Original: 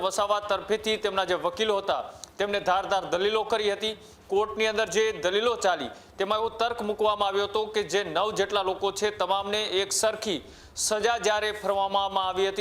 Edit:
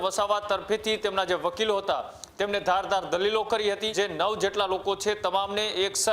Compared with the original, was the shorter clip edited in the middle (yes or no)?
yes